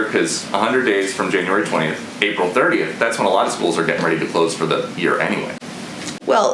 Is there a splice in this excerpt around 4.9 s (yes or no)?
no